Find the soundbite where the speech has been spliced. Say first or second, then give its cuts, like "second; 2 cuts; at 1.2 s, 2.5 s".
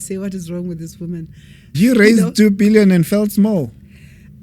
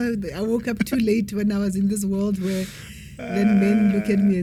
first; 1 cut; at 1.7 s